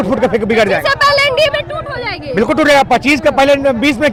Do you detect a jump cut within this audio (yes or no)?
no